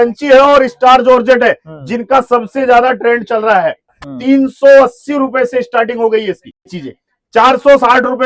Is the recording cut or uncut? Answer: cut